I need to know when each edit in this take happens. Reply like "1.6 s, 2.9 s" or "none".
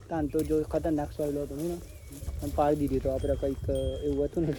none